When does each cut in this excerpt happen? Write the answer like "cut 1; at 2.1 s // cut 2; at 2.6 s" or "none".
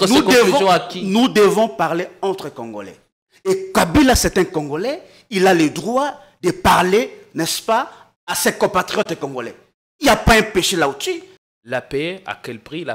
cut 1; at 11.3 s